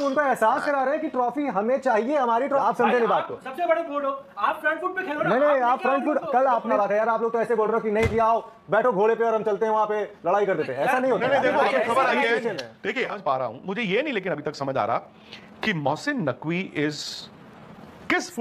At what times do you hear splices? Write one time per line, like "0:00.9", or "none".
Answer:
0:02.6
0:06.7
0:13.2